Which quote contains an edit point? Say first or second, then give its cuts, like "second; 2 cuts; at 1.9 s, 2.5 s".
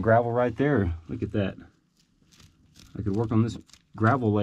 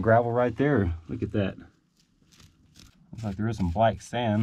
second; 1 cut; at 2.9 s